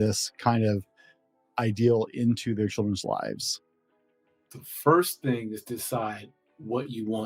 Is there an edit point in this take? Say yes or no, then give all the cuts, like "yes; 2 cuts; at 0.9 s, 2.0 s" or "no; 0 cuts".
no; 0 cuts